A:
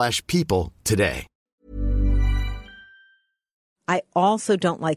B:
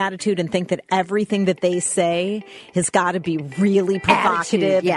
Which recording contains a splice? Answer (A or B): A